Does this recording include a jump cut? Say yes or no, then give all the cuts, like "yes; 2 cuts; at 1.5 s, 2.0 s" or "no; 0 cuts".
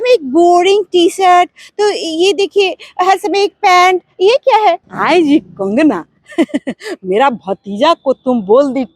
yes; 1 cut; at 4.9 s